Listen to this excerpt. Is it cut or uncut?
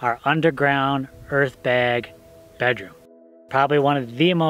cut